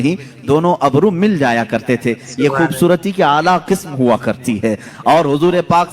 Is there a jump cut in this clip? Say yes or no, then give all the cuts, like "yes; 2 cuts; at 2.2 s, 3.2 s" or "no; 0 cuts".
no; 0 cuts